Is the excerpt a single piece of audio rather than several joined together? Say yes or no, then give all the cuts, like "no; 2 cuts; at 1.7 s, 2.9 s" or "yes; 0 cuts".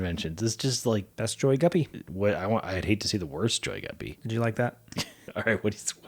no; 4 cuts; at 1.1 s, 2.0 s, 4.1 s, 5.2 s